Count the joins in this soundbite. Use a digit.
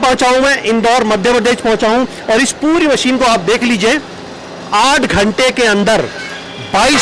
0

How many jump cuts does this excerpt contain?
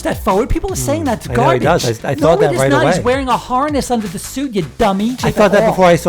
1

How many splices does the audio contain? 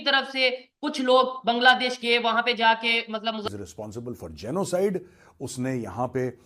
1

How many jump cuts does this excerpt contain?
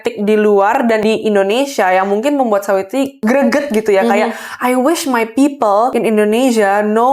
3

